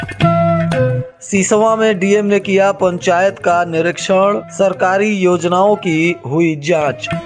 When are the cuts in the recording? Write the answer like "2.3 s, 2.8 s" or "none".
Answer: 1.1 s